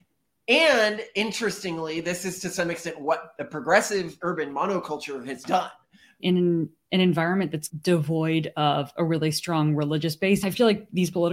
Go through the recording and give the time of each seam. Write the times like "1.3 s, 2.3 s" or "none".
6.2 s, 10.4 s

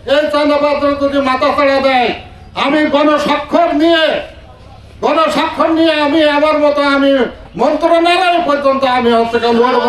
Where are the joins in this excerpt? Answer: none

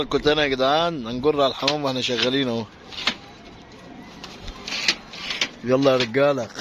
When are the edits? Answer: none

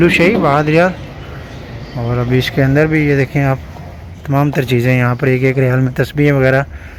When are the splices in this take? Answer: none

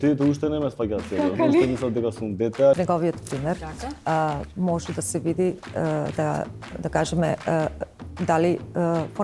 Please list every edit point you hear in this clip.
2.8 s

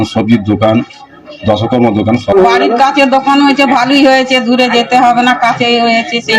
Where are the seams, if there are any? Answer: 2.3 s

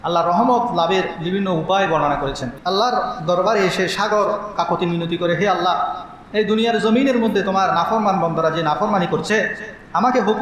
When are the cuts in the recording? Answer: 2.5 s

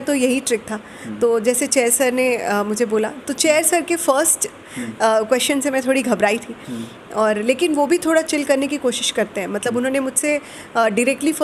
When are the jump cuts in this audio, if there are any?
none

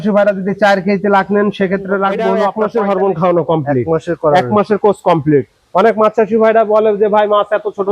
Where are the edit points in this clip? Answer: 2.5 s

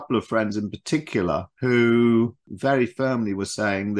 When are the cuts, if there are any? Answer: 1.5 s, 2.5 s

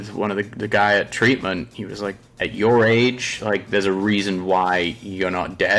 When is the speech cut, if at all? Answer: 2.3 s

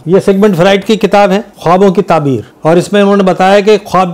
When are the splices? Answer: 2.5 s

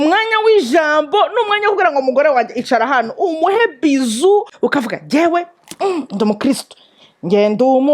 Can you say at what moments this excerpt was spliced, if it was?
4.5 s

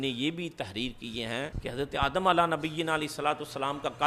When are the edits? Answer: 1.6 s

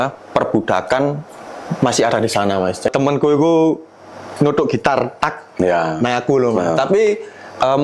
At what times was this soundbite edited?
2.9 s

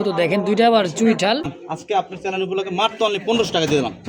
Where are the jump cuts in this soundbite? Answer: 1.6 s

